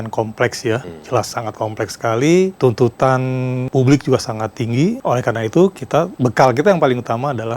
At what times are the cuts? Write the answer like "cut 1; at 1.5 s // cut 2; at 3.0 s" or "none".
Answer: cut 1; at 0.9 s // cut 2; at 2.5 s // cut 3; at 3.7 s // cut 4; at 5.0 s // cut 5; at 6.1 s